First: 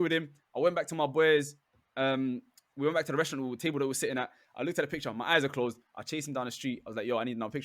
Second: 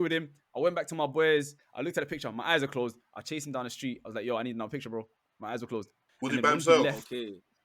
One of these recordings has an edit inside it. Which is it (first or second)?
second